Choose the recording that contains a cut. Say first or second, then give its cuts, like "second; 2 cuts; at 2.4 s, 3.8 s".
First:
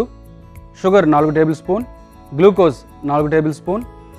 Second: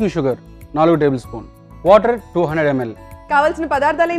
second; 1 cut; at 3.0 s